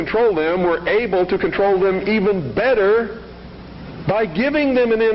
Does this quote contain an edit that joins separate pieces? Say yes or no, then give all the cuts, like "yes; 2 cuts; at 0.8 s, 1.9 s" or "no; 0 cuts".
no; 0 cuts